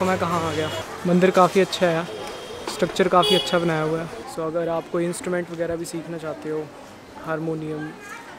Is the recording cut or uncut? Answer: cut